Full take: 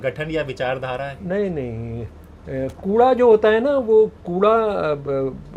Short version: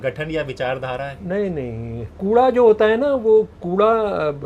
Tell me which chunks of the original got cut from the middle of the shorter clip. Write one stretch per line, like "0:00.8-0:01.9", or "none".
0:02.1-0:02.8